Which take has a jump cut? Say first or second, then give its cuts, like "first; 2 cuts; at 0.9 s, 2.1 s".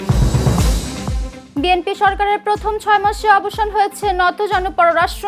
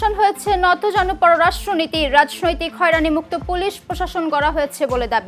first; 1 cut; at 1.3 s